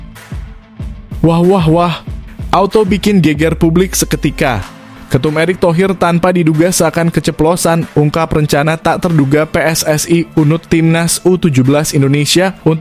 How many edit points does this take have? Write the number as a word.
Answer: one